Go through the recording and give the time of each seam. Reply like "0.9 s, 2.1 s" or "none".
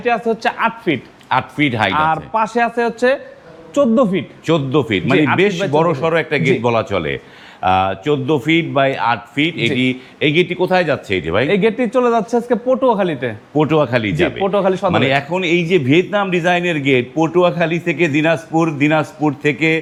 none